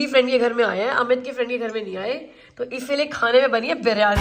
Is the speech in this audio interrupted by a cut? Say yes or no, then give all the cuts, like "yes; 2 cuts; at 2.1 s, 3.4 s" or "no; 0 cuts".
no; 0 cuts